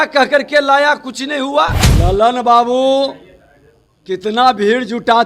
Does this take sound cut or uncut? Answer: cut